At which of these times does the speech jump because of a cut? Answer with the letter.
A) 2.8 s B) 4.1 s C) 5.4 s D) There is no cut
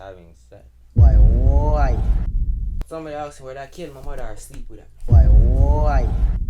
A